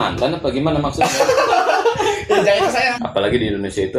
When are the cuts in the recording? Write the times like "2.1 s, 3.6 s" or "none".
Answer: 3.0 s